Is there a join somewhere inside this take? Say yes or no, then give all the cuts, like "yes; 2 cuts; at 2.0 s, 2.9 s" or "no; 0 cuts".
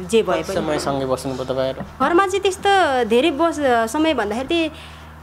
no; 0 cuts